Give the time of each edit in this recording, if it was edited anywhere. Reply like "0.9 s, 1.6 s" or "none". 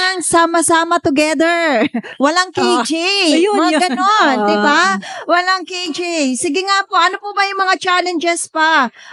none

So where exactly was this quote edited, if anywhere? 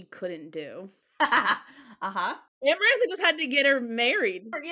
1.0 s, 2.5 s

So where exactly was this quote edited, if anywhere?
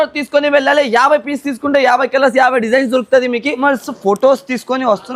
3.6 s

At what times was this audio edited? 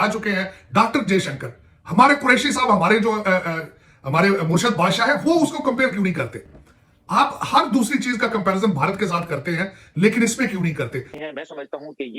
11.1 s

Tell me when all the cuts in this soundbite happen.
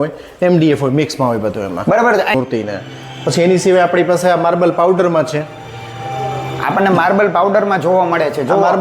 2.3 s

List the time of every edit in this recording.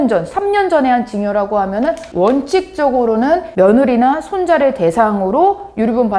2.0 s, 3.5 s

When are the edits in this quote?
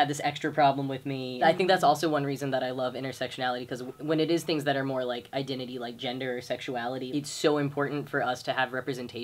1.4 s, 7.1 s

